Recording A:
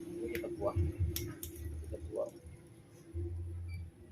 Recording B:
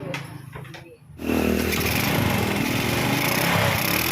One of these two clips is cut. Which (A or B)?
B